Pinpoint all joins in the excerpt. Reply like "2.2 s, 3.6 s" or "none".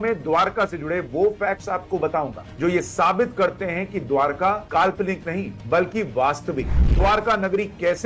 none